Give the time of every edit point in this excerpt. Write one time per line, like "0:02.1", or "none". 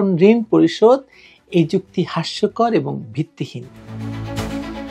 0:03.9